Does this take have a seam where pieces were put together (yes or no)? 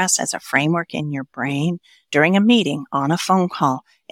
no